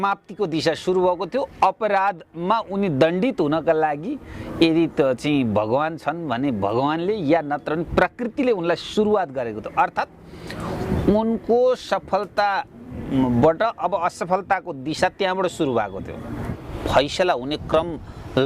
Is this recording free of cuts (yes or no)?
no